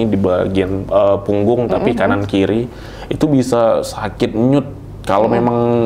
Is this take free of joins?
yes; 0 cuts

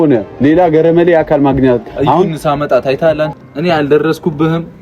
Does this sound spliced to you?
yes; 1 cut; at 3.4 s

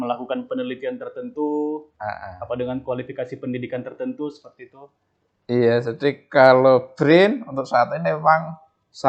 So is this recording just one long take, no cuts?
yes; 0 cuts

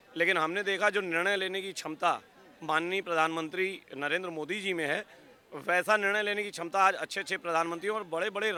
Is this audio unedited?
yes; 0 cuts

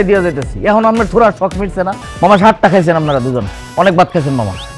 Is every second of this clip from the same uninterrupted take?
no; 1 cut; at 2.0 s

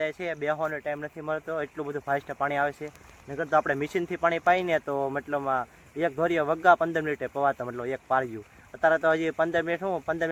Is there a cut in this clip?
no; 0 cuts

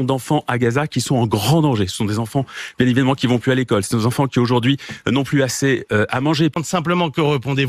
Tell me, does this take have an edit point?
yes; 1 cut; at 6.6 s

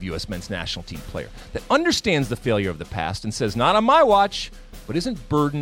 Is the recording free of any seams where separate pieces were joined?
yes; 0 cuts

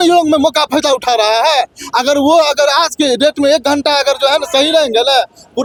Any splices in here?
no; 0 cuts

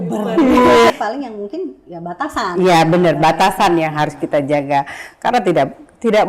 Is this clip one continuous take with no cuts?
no; 1 cut; at 0.9 s

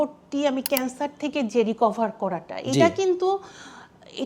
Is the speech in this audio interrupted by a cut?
no; 0 cuts

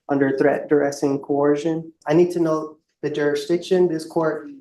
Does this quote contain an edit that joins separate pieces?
yes; 1 cut; at 2.0 s

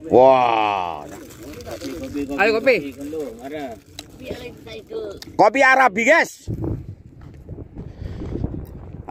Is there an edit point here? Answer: yes; 2 cuts; at 1.1 s, 6.4 s

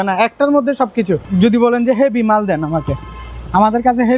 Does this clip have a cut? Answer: yes; 1 cut; at 1.2 s

